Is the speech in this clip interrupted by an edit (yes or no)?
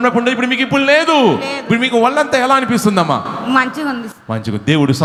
no